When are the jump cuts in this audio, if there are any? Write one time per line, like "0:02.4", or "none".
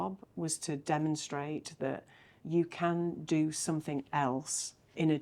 0:02.4